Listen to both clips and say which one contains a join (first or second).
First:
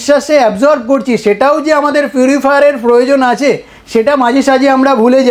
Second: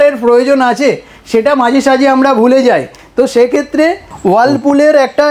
second